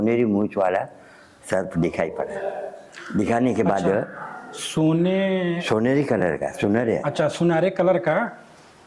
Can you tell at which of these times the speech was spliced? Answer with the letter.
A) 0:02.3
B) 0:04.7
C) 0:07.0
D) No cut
D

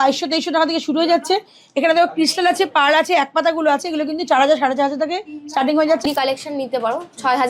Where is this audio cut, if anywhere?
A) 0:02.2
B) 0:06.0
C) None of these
B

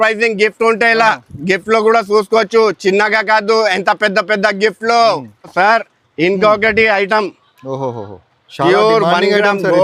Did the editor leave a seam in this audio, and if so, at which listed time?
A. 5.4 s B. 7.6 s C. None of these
C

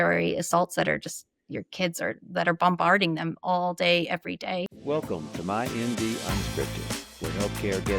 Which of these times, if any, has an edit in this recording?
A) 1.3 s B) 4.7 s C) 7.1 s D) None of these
B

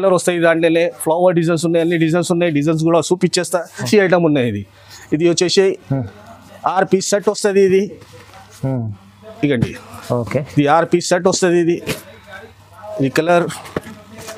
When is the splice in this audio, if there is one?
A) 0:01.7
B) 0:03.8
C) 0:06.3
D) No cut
B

